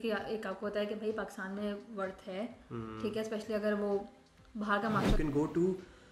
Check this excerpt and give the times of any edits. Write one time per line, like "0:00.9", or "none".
0:05.1